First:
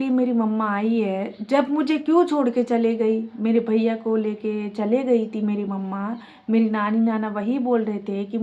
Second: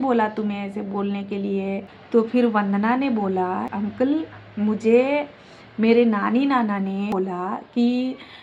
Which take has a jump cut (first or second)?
second